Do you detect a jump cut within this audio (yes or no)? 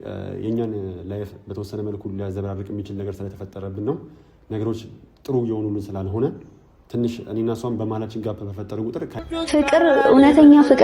yes